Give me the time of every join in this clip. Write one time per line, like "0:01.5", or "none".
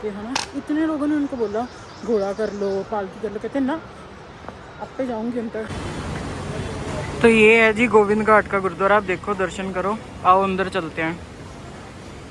0:05.7

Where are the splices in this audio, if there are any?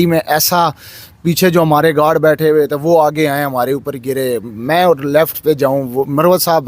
none

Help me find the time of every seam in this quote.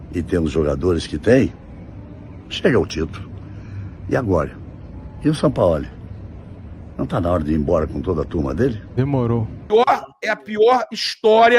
0:09.7

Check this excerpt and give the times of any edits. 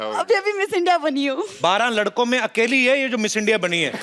0:01.5

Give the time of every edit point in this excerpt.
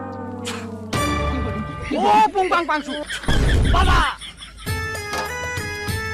0:04.7

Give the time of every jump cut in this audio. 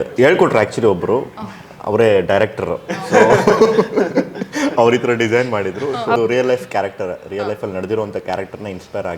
0:06.2

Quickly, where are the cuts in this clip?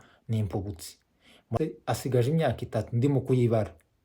0:01.5

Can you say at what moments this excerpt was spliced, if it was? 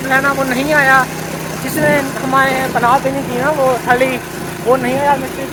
none

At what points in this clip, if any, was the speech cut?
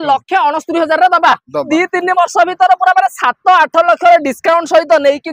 0:01.6

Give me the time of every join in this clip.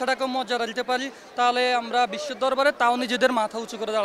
none

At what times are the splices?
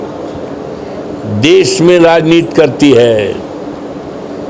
none

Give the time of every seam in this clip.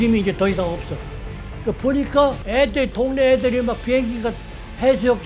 0:02.4

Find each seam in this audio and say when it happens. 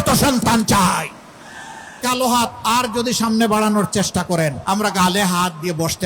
0:02.0
0:04.6

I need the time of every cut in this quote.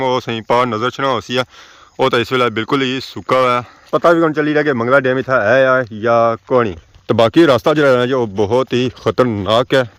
none

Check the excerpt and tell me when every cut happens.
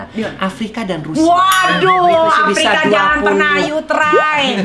none

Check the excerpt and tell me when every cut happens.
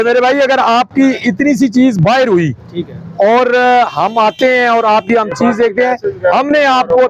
none

